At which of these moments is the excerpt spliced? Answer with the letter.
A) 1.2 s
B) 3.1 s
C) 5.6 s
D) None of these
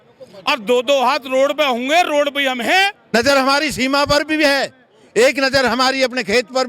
B